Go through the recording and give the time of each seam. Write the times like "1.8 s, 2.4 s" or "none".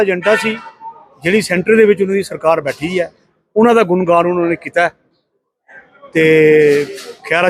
none